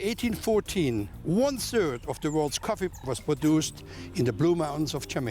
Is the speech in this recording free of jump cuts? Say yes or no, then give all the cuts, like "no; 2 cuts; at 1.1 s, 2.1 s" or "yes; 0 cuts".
yes; 0 cuts